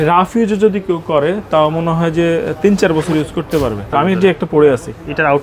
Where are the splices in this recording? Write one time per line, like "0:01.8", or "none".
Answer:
0:03.9